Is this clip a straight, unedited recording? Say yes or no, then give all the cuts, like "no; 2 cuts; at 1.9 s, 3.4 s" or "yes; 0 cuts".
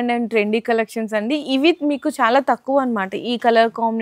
yes; 0 cuts